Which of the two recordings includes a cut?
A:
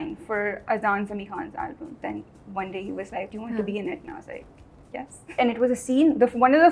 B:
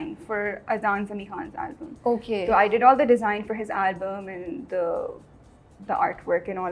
A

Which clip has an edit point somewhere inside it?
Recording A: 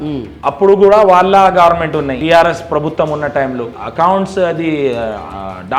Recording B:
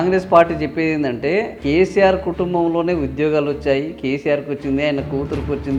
A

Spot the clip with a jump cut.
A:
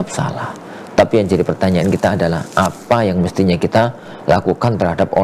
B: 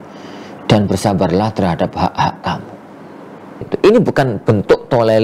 B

